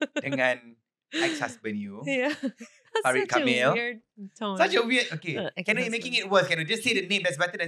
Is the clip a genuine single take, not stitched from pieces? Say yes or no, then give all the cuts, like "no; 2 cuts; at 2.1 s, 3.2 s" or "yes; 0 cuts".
yes; 0 cuts